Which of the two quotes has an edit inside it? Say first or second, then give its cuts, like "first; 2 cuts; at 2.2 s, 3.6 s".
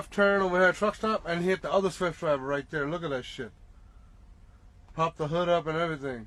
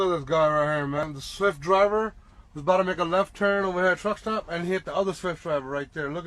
second; 1 cut; at 1.0 s